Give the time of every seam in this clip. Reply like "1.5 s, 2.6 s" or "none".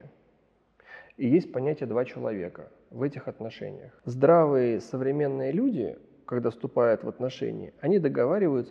3.9 s